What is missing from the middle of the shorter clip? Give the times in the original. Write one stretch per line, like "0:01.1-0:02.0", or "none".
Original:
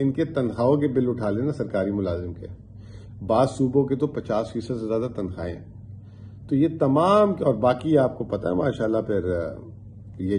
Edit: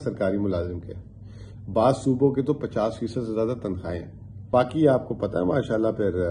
0:06.0-0:07.6